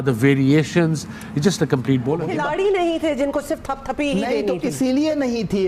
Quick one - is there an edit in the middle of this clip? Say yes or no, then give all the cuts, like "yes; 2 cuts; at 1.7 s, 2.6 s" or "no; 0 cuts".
yes; 1 cut; at 2.2 s